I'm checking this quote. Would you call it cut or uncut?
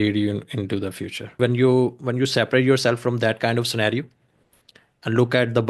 cut